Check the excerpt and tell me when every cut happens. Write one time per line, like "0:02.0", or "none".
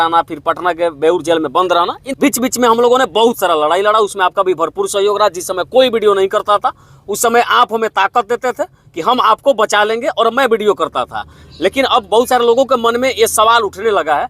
0:02.0